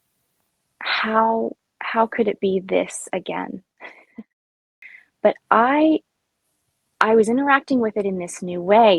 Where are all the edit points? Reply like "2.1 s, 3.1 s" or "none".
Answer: 4.6 s